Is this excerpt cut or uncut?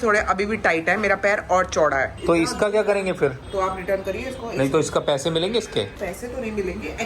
cut